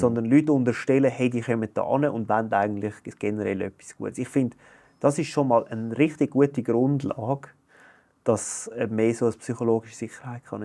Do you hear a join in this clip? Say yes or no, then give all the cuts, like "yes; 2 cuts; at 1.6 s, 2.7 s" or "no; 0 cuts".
no; 0 cuts